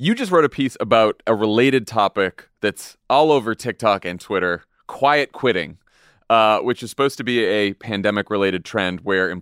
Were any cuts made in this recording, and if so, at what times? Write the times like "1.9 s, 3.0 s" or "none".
1.2 s

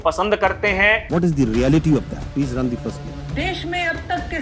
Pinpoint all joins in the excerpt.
1.0 s, 2.2 s, 3.1 s

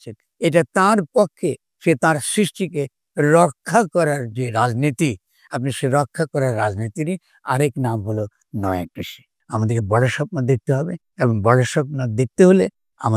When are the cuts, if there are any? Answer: 9.3 s

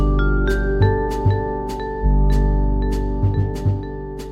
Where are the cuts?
none

